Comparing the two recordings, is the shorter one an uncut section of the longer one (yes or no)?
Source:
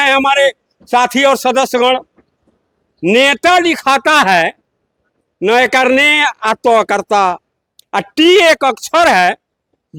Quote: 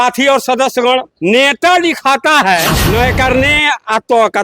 no